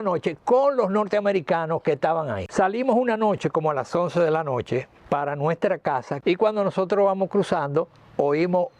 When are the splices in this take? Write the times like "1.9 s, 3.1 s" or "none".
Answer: 2.5 s, 6.1 s

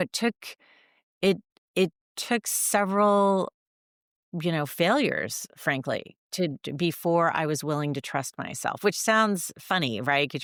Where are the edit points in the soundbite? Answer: none

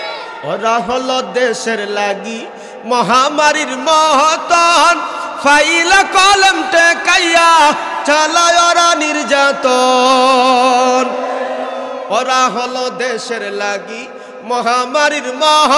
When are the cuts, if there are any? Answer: none

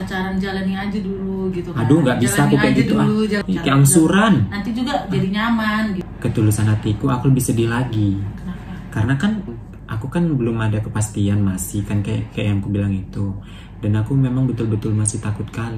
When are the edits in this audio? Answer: 3.4 s, 6.1 s, 9.6 s

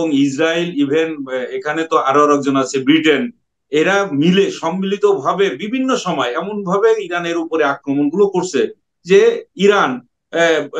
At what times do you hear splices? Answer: none

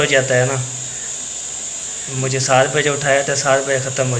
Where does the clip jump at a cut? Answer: none

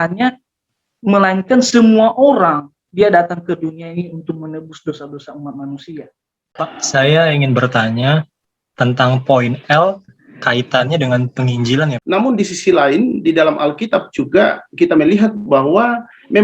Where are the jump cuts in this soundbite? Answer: 6.5 s, 12.0 s

